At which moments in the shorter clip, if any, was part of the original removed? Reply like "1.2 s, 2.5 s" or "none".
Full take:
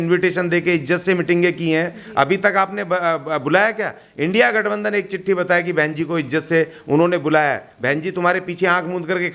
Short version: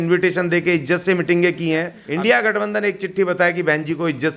2.0 s

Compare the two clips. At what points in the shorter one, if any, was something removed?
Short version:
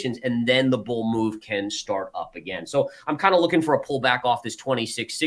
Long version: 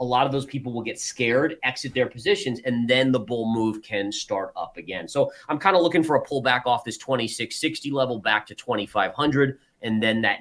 none

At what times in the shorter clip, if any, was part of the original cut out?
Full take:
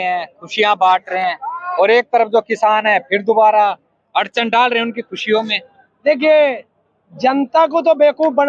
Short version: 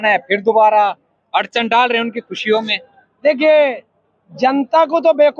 none

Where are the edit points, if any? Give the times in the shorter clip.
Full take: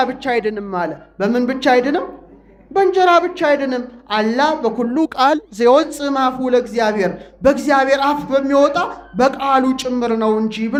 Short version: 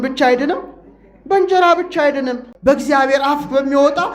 2.5 s

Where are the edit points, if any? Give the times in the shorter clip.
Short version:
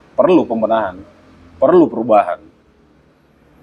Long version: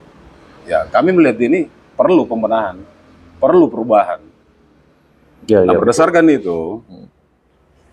none

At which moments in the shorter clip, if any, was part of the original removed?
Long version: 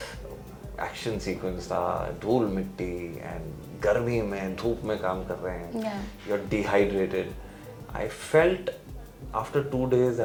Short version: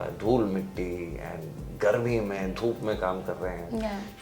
none

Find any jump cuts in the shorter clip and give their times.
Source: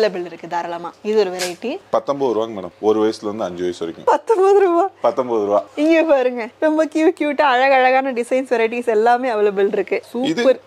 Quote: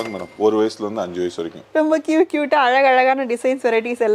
1.5 s

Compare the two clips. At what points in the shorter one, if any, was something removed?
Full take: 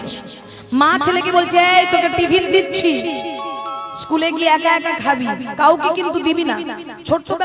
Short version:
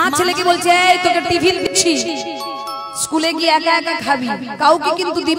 1.7 s

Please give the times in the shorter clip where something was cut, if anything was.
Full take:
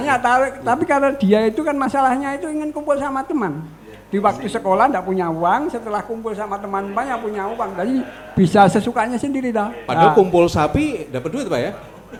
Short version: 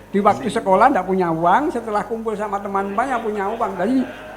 none

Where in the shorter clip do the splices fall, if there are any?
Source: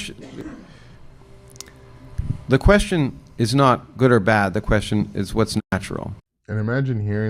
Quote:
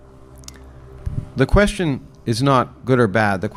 none

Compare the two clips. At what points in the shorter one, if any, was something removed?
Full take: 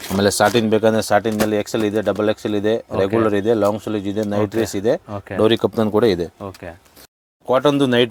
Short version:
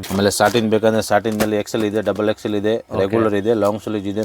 none

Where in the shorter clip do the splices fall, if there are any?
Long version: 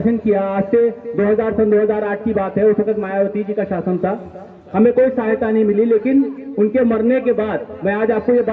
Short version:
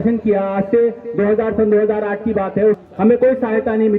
2.8 s

